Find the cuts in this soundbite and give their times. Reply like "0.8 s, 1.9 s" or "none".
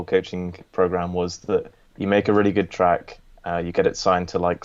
1.8 s